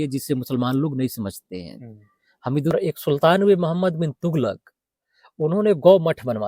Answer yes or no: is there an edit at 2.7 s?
yes